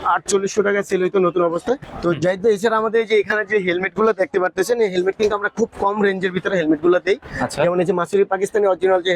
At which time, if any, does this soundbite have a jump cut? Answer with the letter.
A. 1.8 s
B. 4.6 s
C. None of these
A